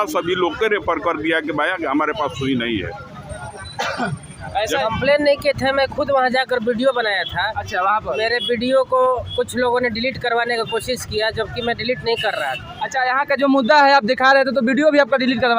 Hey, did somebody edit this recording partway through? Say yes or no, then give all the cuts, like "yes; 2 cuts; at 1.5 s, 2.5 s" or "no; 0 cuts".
yes; 1 cut; at 4.8 s